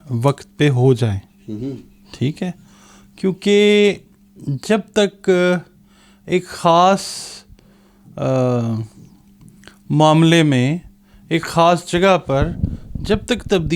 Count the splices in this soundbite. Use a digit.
0